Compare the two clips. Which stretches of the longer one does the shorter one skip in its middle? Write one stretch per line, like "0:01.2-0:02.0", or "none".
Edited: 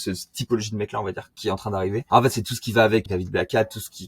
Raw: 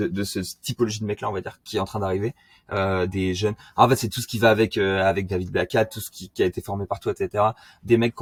0:02.3-0:03.7
0:04.7-0:05.3